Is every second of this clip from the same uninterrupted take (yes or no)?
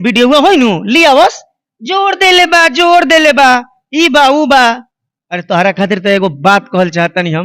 yes